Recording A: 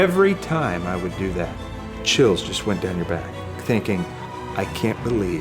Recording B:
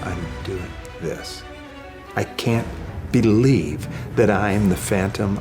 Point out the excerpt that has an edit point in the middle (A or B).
A